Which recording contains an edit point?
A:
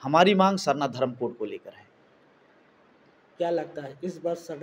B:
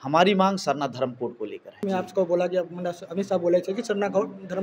B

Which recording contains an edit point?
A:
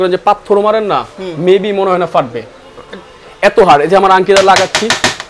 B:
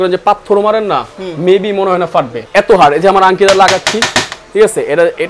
B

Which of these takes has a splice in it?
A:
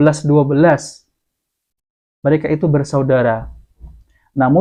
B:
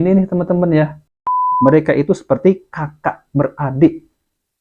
B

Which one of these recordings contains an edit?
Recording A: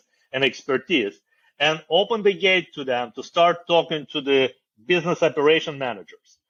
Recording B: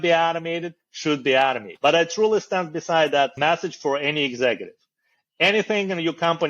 B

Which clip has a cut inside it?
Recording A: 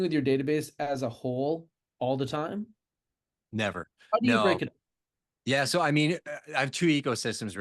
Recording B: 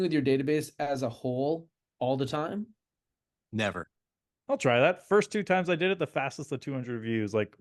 B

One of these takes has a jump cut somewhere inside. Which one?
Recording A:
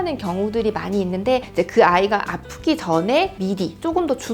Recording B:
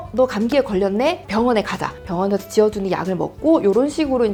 A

